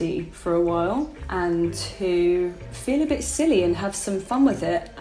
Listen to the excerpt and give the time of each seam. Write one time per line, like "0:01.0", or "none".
0:01.2
0:02.7